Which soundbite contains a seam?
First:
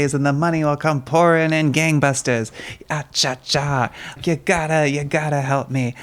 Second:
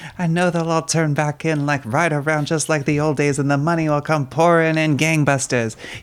first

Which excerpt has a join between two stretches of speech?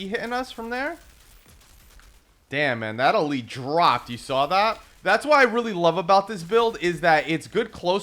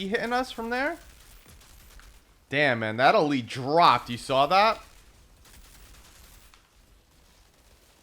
first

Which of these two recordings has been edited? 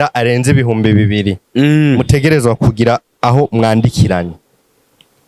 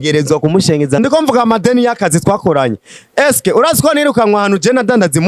second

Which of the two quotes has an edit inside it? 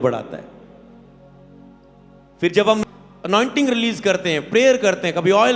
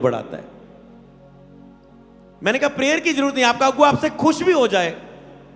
second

